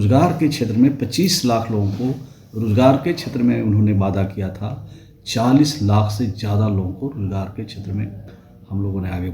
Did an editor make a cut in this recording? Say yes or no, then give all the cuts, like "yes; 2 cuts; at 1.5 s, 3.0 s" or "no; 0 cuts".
no; 0 cuts